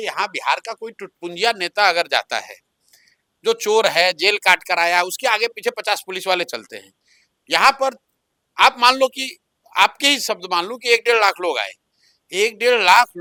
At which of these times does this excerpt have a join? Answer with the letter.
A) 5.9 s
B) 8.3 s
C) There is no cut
C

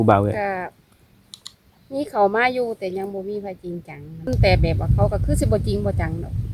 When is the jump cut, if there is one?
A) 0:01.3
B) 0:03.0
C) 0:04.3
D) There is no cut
C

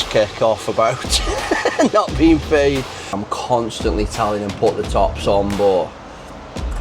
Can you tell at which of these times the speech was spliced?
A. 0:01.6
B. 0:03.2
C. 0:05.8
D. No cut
B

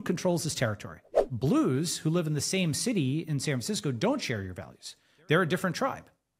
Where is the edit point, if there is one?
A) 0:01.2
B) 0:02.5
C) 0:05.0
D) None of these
A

